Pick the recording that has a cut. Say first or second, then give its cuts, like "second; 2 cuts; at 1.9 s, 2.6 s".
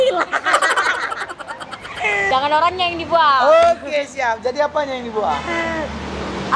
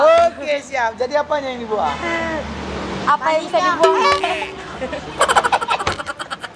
first; 1 cut; at 2.3 s